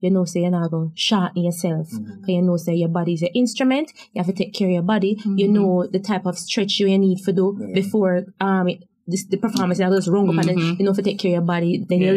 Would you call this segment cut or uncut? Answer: uncut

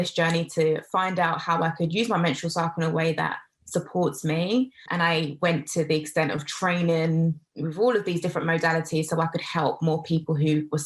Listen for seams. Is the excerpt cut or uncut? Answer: cut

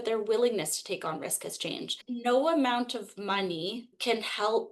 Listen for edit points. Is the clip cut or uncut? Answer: cut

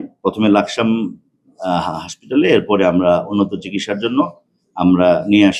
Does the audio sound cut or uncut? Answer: uncut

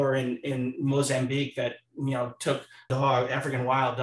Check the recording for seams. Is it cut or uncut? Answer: cut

